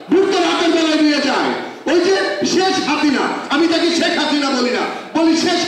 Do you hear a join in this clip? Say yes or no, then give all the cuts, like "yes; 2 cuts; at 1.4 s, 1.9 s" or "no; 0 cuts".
no; 0 cuts